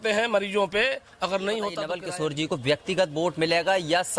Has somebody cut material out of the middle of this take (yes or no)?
yes